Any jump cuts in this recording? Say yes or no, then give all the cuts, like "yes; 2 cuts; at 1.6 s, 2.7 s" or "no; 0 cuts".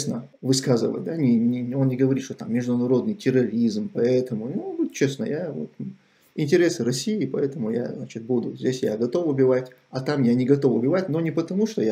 no; 0 cuts